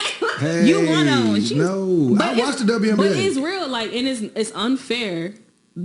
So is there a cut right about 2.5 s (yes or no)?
yes